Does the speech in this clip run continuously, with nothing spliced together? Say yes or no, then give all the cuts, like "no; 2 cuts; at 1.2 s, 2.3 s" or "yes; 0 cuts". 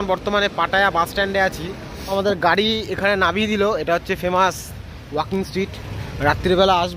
no; 1 cut; at 2.1 s